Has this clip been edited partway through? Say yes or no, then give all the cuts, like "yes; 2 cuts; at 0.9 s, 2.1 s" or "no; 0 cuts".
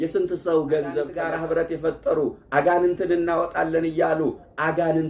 yes; 1 cut; at 1.2 s